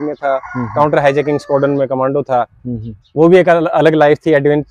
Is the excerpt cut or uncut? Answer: uncut